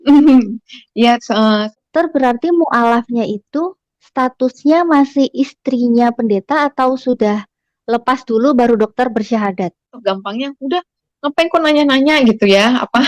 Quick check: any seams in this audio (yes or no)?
yes